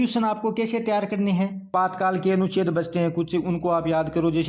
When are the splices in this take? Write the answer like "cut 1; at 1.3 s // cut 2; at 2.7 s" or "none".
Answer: cut 1; at 1.7 s